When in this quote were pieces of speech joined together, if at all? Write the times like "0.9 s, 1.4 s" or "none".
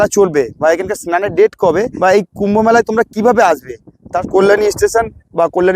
1.9 s, 4.1 s